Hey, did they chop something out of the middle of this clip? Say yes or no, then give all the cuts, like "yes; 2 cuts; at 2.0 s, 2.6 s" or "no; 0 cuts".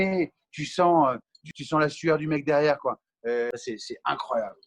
yes; 1 cut; at 3.6 s